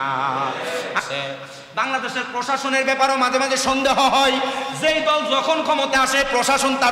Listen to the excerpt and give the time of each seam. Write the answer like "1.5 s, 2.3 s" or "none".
1.0 s

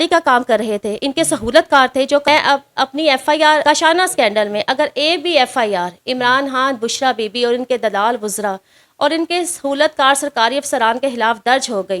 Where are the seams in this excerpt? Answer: 2.3 s, 3.6 s

